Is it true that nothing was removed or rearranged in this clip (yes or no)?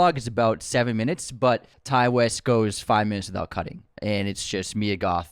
no